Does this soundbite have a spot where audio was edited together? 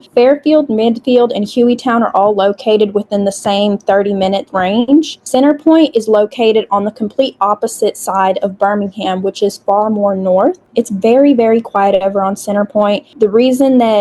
yes; 3 cuts; at 5.2 s, 10.6 s, 13.1 s

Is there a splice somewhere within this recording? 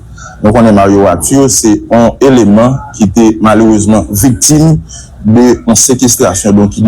yes; 2 cuts; at 1.8 s, 4.4 s

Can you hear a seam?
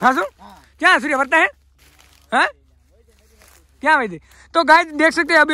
no; 0 cuts

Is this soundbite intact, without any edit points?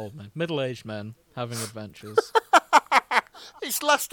yes; 0 cuts

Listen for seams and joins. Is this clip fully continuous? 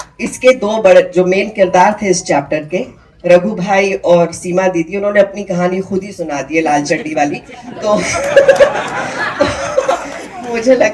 yes; 0 cuts

